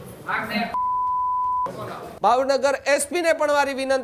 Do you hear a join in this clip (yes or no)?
yes